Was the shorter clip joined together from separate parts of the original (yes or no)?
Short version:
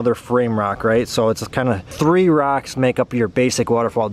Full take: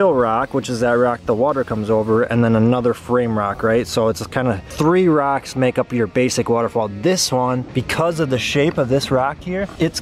no